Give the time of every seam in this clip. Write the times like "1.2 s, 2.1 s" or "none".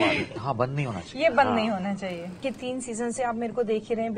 2.4 s